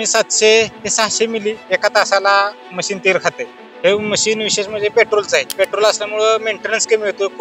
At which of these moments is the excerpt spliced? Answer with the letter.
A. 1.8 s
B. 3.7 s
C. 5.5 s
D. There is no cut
C